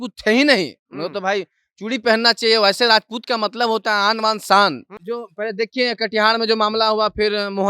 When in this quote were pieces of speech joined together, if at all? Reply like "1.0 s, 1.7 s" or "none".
4.9 s

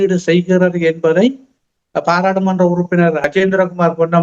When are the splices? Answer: 3.2 s

